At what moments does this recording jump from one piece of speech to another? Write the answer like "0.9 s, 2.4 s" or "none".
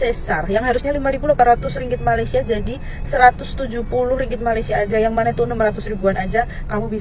none